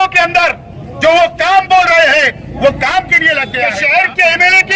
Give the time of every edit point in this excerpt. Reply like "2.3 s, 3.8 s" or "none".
3.7 s